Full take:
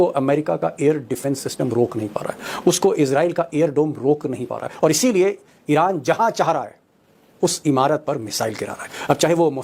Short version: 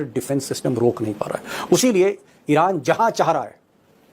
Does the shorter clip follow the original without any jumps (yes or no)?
no